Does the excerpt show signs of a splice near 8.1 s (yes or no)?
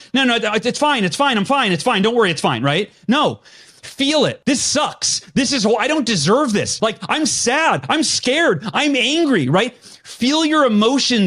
no